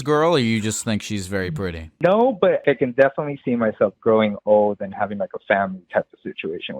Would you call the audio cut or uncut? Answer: cut